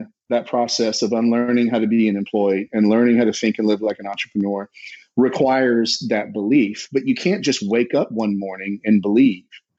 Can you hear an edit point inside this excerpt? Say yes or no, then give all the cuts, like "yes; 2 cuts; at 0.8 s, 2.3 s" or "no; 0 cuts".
no; 0 cuts